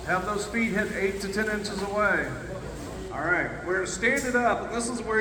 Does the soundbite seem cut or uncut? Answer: uncut